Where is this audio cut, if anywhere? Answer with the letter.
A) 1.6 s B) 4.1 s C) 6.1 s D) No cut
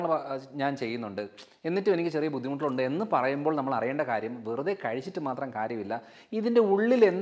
D